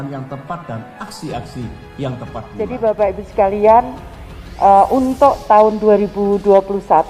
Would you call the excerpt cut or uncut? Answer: cut